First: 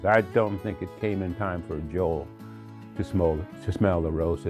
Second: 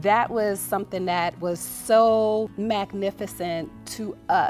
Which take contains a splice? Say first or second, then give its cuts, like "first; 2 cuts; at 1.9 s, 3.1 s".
second; 1 cut; at 2.5 s